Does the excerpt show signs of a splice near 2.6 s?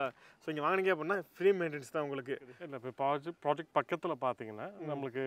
yes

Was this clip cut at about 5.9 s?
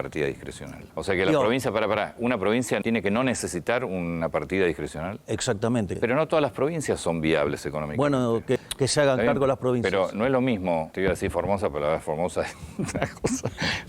yes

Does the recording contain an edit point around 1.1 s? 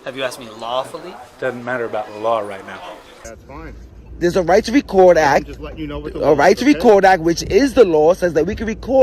no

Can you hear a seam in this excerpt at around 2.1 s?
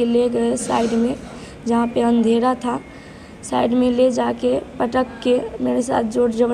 no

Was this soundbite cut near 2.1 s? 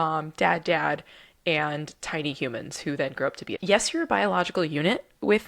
no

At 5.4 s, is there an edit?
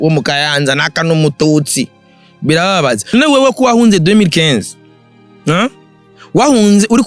no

